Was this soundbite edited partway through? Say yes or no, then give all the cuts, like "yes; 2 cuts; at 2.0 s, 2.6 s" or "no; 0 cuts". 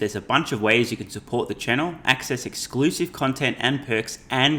no; 0 cuts